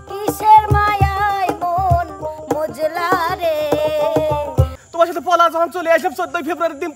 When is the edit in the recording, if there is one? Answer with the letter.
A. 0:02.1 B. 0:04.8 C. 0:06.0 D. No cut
B